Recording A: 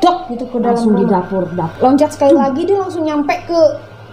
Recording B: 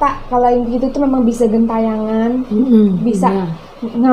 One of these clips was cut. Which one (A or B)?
A